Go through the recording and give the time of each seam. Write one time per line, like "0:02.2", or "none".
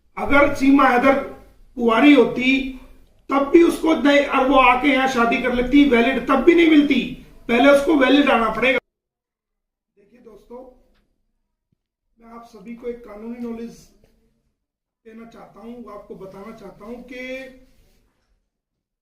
0:08.8